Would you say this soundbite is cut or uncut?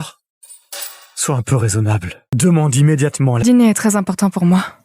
cut